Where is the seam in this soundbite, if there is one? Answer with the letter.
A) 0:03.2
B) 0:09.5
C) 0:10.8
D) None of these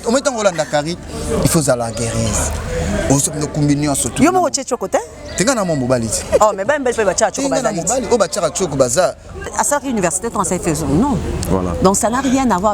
B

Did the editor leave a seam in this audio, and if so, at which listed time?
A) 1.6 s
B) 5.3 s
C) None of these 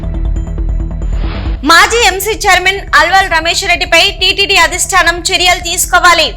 A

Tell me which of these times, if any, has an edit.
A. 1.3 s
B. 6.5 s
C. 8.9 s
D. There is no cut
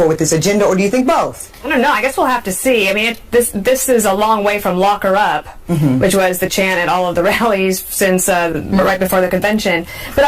C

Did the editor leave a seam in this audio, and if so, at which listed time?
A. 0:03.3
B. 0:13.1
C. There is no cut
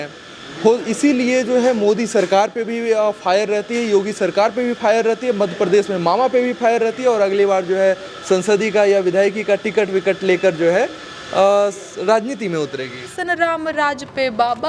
B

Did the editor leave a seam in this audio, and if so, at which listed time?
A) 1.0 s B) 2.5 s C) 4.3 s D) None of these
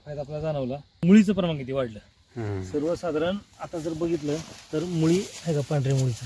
A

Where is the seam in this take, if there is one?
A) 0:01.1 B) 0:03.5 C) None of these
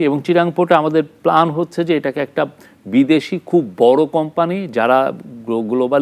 C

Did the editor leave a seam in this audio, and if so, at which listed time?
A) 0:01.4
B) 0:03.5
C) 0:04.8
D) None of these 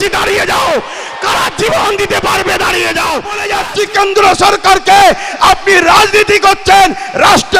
B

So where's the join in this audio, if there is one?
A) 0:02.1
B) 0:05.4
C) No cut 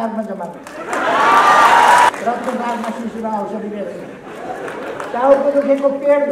A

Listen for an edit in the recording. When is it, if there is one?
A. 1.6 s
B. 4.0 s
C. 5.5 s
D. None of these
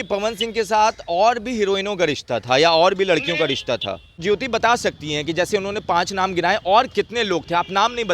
B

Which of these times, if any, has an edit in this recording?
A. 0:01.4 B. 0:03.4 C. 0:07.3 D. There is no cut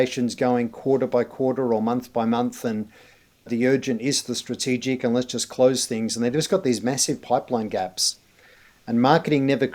D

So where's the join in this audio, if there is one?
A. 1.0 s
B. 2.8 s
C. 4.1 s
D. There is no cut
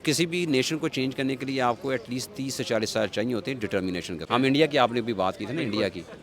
C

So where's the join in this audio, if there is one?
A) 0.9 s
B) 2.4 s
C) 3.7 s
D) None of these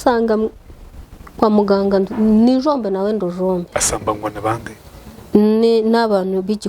C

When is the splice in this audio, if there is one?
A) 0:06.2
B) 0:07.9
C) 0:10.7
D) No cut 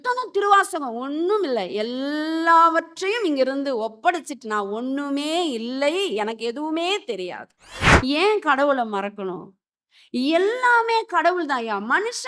B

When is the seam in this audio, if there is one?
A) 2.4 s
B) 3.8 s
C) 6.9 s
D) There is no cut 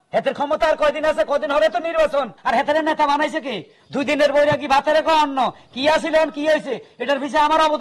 A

